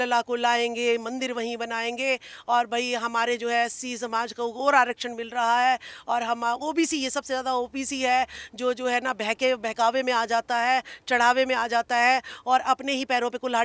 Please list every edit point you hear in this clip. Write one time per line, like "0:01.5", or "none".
none